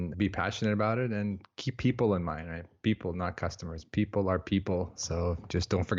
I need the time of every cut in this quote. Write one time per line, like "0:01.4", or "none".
0:05.0

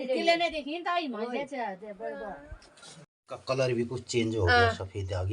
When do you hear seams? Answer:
0:03.0

